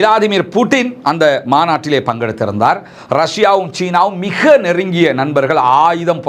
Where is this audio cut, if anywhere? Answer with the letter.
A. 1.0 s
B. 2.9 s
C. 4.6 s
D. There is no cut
D